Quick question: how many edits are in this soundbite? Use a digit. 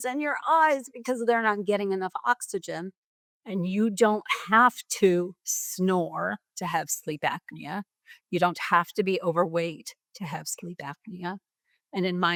0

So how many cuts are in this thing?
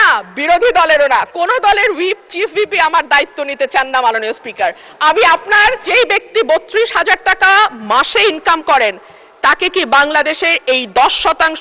1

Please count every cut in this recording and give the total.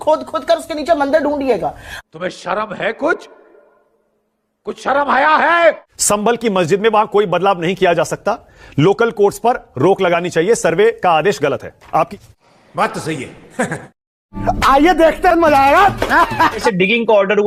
3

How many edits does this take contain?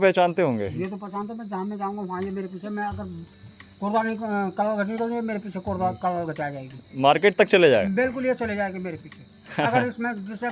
0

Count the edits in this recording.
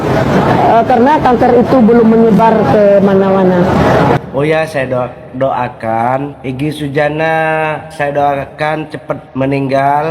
4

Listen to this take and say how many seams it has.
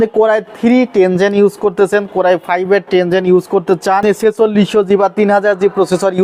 1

